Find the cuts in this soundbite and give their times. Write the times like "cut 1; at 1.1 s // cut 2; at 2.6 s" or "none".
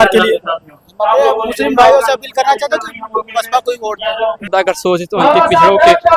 cut 1; at 4.5 s